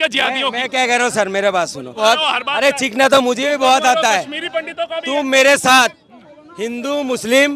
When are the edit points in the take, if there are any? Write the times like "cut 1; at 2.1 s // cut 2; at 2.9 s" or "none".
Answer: cut 1; at 2.0 s